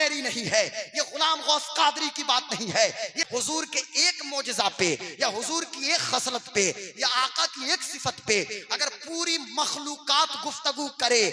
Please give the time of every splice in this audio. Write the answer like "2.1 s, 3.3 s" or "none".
3.2 s